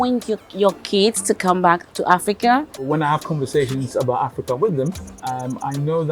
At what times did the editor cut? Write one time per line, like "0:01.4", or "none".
0:02.8

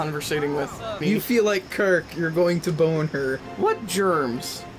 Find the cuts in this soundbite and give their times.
0:01.0
0:03.4

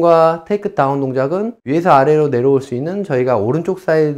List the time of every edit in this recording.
0:01.6

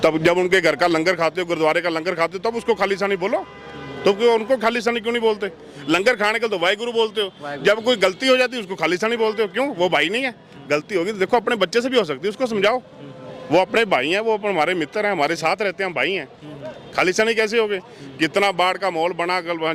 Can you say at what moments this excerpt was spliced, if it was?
none

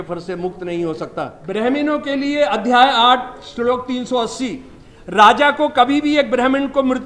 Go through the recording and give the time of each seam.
0:01.4

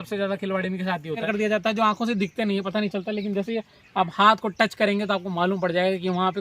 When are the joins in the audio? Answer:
0:01.2

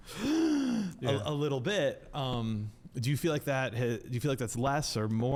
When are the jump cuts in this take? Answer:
none

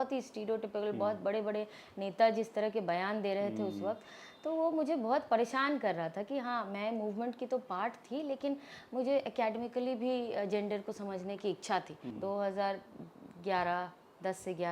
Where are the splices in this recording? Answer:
0:12.0

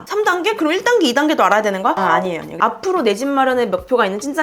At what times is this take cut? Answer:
0:02.6

